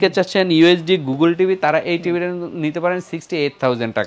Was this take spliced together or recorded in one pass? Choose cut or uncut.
uncut